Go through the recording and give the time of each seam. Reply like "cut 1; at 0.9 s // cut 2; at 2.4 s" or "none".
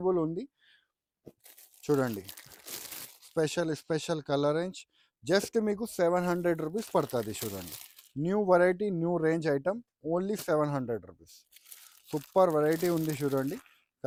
none